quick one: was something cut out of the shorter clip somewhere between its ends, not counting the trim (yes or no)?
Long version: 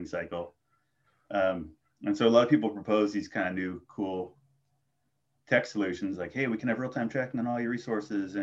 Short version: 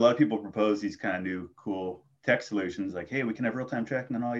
yes